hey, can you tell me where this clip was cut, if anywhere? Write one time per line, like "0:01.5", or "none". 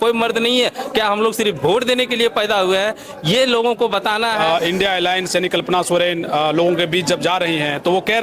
0:04.4